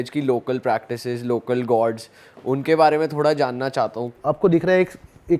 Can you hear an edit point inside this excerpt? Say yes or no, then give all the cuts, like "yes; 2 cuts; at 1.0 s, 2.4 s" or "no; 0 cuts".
yes; 1 cut; at 4.1 s